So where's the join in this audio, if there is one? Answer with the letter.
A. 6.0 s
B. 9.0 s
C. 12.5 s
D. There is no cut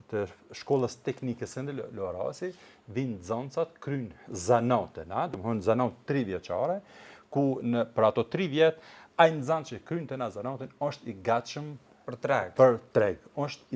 D